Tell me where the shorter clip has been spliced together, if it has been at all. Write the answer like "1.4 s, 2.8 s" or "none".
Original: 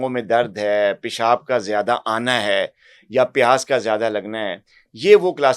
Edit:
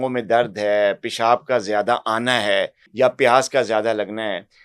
2.8 s